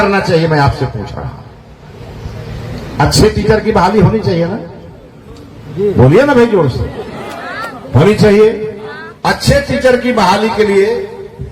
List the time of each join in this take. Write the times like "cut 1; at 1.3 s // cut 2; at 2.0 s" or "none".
none